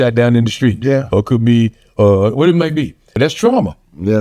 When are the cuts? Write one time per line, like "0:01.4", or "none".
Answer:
0:03.0